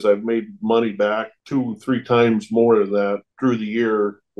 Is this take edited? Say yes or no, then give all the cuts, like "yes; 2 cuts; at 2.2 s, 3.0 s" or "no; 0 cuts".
no; 0 cuts